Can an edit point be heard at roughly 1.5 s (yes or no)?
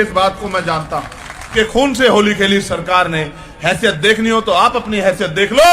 yes